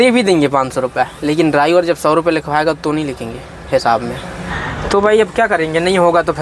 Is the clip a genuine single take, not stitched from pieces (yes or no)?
no